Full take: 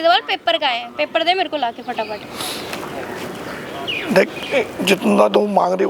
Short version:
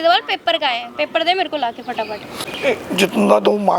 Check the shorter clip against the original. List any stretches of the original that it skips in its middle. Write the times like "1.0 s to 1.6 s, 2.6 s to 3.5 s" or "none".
2.5 s to 4.4 s